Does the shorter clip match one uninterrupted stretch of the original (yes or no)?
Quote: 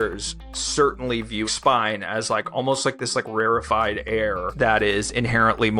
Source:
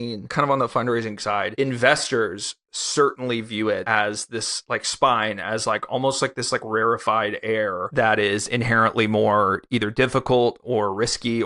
no